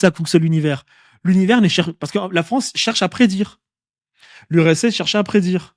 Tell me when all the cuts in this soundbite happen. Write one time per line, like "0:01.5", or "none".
none